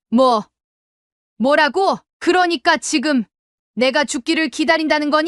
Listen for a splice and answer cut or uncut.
cut